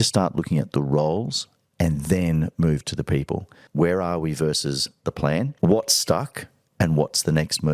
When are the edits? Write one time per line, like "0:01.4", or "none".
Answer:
0:03.6
0:05.5